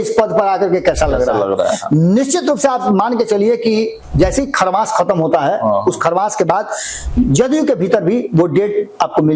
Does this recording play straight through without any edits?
yes; 0 cuts

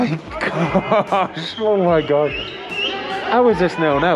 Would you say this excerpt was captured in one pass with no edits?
yes; 0 cuts

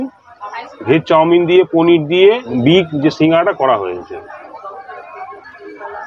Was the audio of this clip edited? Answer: yes; 1 cut; at 2.5 s

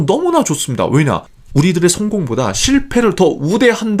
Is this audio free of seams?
yes; 0 cuts

